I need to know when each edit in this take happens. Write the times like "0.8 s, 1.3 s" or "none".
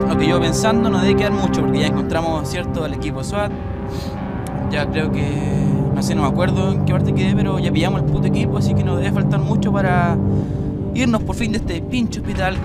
5.6 s